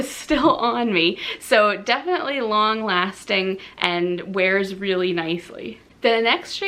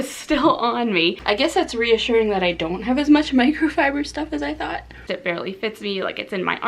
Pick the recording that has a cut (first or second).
second